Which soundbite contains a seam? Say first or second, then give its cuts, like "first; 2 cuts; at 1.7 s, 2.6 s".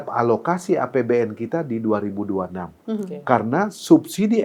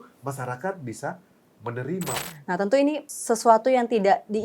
second; 2 cuts; at 2.2 s, 3.1 s